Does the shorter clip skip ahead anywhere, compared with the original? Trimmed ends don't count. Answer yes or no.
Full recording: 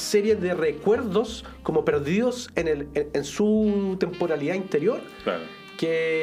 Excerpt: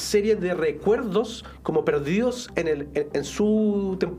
no